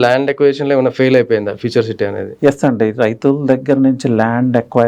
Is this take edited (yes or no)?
no